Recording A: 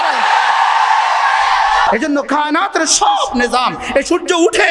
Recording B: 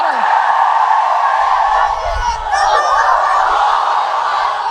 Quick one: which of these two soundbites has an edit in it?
A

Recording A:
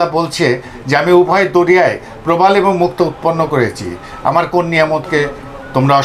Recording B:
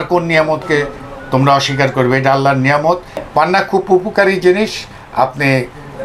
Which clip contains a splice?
B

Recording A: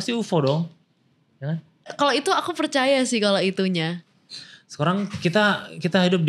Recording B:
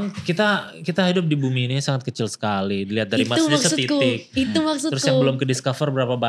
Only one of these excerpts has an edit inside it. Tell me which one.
A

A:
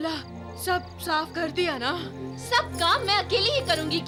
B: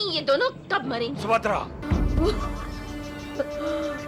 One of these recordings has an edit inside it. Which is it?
B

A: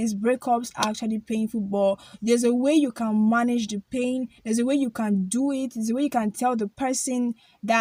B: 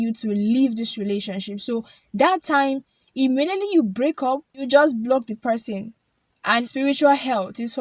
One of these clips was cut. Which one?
B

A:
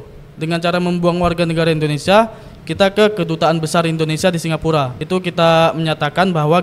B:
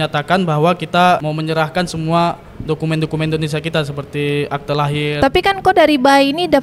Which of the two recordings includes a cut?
B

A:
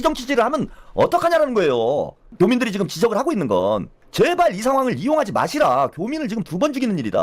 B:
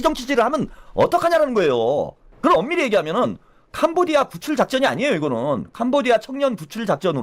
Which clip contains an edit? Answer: B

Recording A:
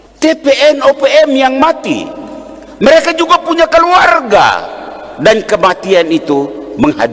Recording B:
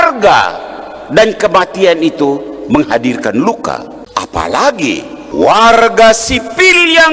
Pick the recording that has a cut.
B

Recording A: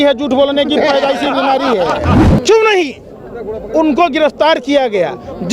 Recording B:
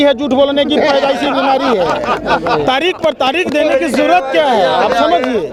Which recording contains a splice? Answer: A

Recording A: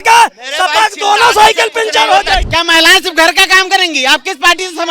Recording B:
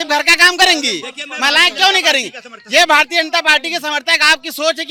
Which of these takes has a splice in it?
A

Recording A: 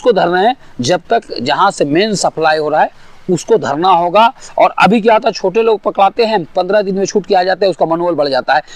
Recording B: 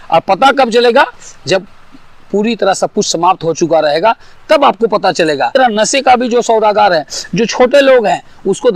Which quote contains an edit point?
B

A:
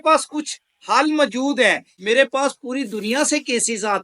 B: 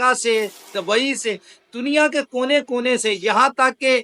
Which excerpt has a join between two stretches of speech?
A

